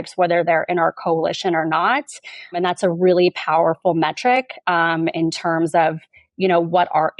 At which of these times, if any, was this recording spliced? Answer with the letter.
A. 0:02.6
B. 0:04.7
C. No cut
A